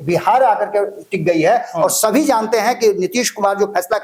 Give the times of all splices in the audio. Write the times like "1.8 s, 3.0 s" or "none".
none